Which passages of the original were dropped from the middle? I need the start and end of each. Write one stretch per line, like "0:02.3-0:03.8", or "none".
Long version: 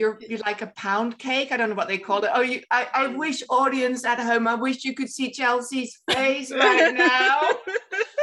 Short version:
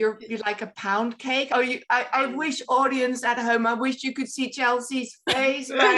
0:01.5-0:02.3

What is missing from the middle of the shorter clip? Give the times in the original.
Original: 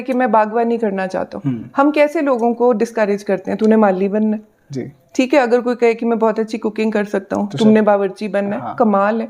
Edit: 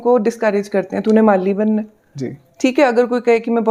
none

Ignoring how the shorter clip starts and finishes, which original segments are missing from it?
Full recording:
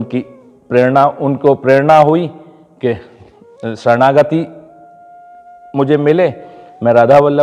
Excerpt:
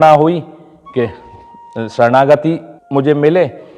0:04.6-0:05.6

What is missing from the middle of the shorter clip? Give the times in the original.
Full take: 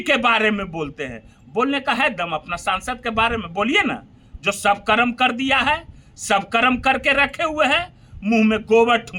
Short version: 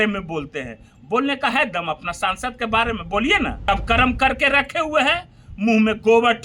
0:04.0-0:06.2

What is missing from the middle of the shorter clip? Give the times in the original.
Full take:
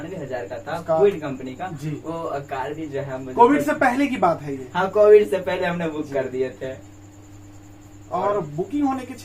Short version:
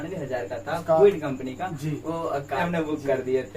0:02.6-0:05.7

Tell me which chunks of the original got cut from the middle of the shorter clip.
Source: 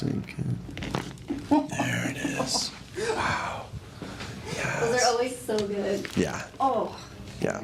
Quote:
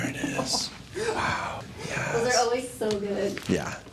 0:03.7-0:04.4

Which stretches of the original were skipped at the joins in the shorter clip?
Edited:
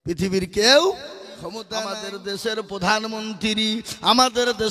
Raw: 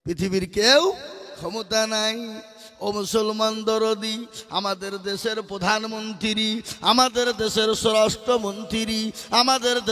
0:01.6-0:04.4

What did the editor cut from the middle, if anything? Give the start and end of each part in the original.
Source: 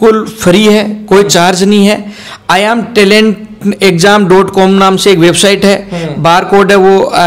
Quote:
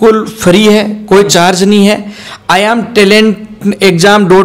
none

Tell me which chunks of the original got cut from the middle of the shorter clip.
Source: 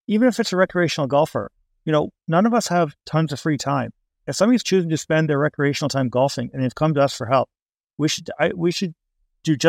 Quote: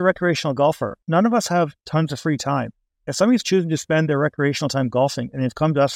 0:01.5-0:02.2

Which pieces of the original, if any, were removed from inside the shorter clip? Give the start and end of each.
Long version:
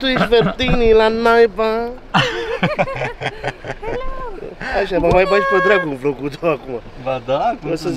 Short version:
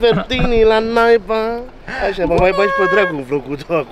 0:02.0-0:04.4

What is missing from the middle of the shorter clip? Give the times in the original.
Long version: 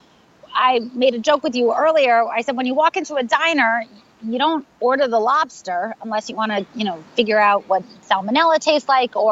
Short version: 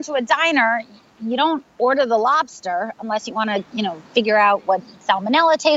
none

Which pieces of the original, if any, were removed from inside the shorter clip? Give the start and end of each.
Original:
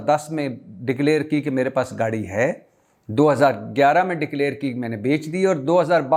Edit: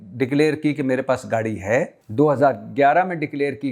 0:02.7-0:03.0

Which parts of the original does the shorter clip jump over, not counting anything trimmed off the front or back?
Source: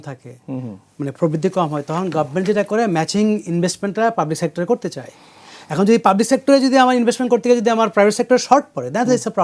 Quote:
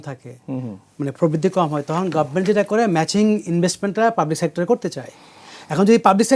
none

